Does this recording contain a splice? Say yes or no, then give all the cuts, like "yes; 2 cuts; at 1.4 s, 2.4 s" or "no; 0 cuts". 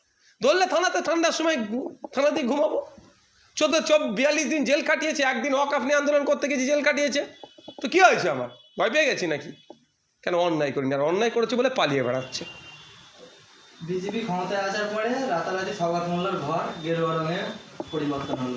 no; 0 cuts